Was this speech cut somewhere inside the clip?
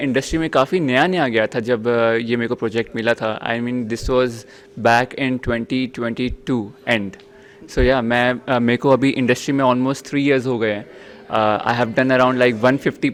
no; 0 cuts

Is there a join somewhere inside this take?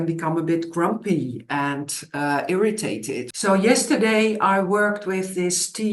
yes; 1 cut; at 3.3 s

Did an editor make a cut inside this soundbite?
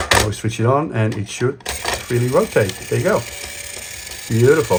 no; 0 cuts

